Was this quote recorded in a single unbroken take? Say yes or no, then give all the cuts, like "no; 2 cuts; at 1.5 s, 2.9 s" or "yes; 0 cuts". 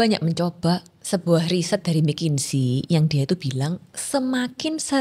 no; 1 cut; at 0.9 s